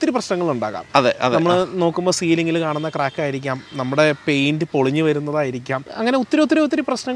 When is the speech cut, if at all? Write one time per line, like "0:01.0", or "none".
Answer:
0:05.9

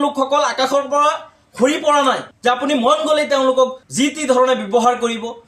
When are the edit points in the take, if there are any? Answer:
none

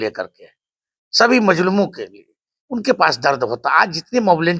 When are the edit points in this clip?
none

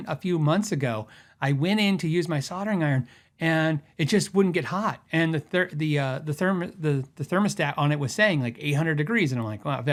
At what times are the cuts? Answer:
none

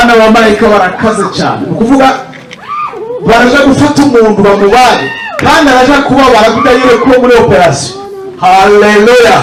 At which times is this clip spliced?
none

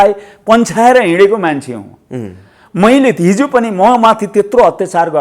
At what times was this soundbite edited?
none

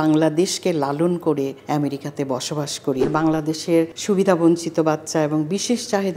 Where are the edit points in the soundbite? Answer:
0:01.6
0:03.0
0:04.0

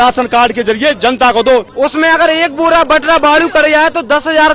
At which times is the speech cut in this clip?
0:01.7

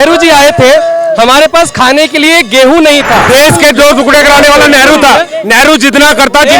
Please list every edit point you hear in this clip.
0:03.2

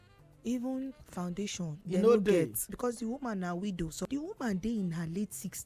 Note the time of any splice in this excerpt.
0:01.8
0:02.6
0:04.0

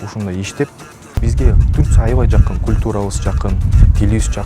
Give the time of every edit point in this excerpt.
0:01.2

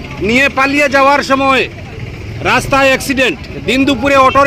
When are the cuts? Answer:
none

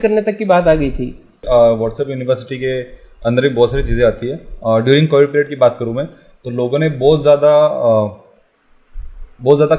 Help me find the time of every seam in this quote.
0:01.3

